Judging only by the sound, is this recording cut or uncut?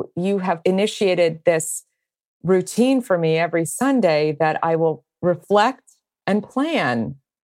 uncut